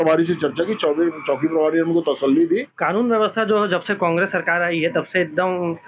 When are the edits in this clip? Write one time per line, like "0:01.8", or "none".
0:02.7

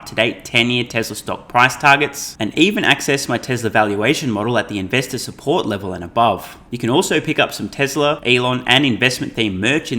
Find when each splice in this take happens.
0:06.6
0:08.2

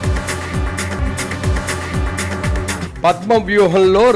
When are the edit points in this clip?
0:01.0

